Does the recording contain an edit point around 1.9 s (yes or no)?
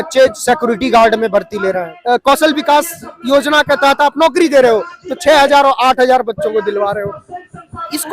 yes